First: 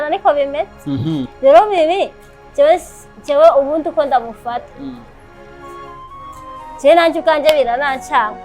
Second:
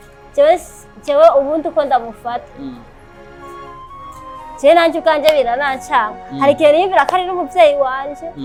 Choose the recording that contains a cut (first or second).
first